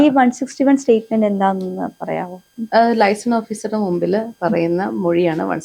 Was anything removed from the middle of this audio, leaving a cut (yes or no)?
no